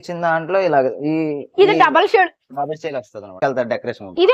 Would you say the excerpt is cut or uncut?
cut